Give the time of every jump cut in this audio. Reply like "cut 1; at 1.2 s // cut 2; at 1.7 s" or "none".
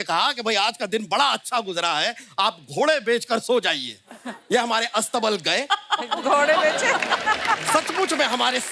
none